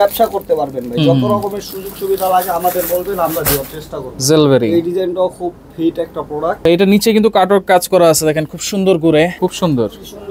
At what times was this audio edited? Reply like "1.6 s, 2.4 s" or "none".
4.1 s, 6.7 s, 9.3 s